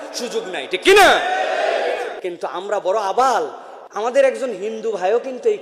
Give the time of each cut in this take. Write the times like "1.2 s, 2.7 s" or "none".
none